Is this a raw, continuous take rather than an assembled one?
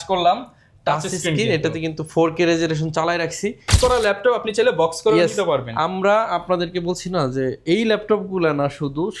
no; 1 cut; at 3.7 s

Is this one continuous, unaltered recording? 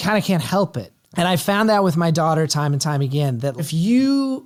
yes; 0 cuts

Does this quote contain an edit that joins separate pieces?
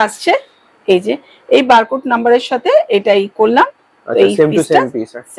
no; 0 cuts

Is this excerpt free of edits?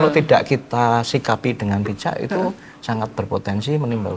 yes; 0 cuts

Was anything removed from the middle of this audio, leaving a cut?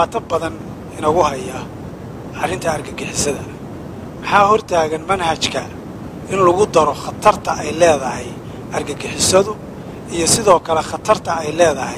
no; 0 cuts

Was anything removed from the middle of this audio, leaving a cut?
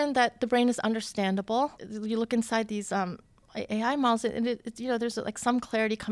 yes; 1 cut; at 1.9 s

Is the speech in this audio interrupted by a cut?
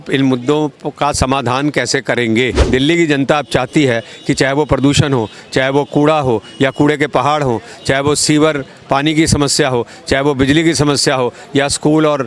yes; 1 cut; at 2.6 s

